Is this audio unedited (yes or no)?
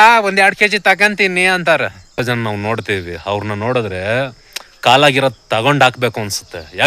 no